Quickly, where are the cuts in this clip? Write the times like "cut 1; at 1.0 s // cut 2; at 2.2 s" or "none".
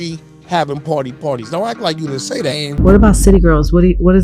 cut 1; at 2.6 s